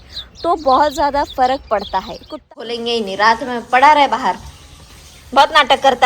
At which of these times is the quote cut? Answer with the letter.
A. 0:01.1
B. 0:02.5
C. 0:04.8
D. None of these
B